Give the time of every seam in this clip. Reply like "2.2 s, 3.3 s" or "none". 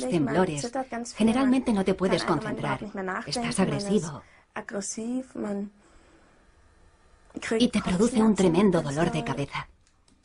8.3 s